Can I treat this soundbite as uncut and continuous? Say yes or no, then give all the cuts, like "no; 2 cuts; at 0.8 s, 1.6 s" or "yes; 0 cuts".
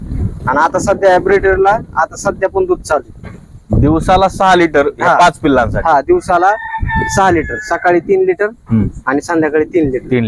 yes; 0 cuts